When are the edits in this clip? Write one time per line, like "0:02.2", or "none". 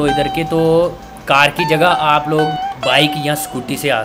0:02.8